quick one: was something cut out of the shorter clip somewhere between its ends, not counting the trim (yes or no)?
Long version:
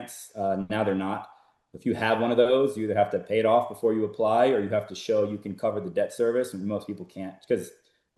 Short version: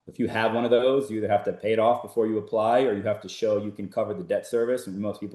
no